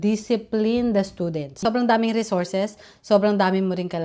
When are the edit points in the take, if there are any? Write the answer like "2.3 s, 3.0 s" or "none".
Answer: 1.5 s